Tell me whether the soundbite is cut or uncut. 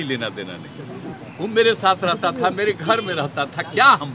cut